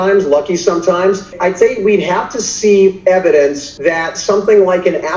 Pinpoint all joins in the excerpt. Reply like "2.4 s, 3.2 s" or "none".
1.4 s, 3.7 s